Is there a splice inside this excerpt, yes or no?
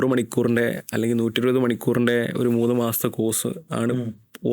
no